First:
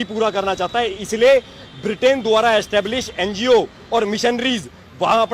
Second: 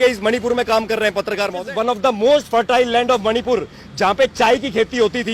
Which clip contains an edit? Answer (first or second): second